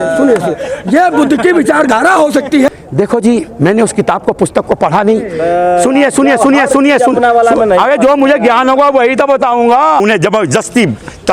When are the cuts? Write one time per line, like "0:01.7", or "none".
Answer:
0:02.7
0:10.0